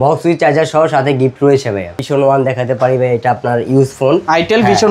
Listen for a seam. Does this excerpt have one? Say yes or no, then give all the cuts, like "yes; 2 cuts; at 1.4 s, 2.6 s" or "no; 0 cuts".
yes; 1 cut; at 2.0 s